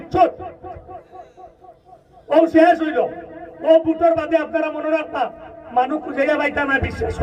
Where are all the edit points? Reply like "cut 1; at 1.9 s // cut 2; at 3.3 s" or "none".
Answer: none